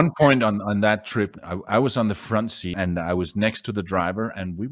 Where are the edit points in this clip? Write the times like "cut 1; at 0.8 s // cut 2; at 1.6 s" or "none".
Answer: cut 1; at 2.6 s